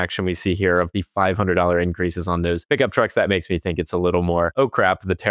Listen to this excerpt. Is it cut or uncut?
cut